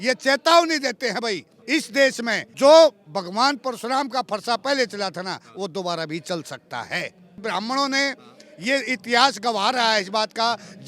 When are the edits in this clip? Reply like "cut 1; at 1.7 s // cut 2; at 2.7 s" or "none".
cut 1; at 1.5 s // cut 2; at 2.4 s // cut 3; at 7.4 s